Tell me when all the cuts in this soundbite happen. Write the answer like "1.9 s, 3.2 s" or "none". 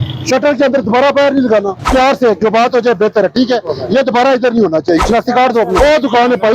1.9 s, 5.3 s